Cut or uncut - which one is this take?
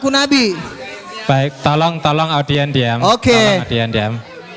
uncut